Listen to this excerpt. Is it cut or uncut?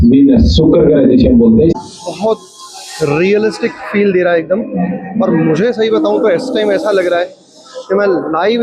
cut